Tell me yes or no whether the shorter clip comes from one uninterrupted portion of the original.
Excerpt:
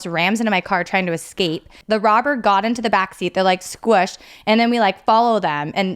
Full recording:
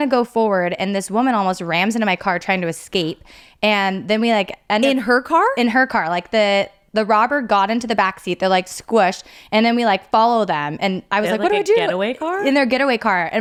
no